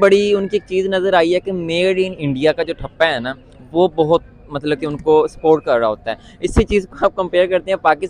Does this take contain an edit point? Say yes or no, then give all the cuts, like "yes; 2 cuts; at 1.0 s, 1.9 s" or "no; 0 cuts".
no; 0 cuts